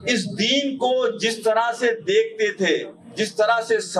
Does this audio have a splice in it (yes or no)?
no